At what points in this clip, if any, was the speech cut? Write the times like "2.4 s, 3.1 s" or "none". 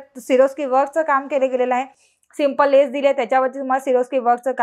none